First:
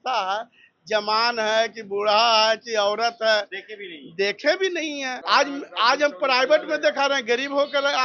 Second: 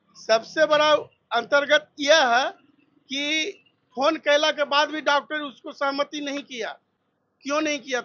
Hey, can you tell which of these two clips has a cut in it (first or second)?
first